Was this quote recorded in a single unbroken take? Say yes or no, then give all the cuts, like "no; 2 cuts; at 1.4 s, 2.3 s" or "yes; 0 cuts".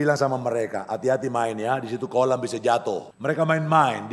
no; 1 cut; at 3.1 s